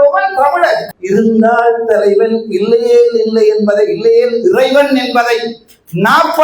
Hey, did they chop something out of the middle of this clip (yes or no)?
yes